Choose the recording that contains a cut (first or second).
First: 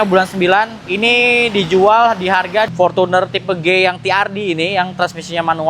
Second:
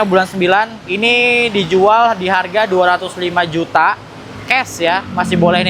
first